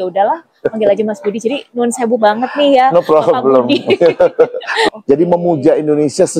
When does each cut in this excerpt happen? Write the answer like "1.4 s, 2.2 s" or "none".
4.9 s